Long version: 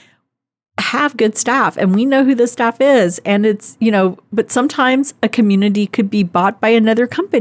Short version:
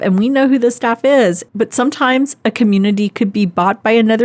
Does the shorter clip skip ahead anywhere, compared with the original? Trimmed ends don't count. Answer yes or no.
yes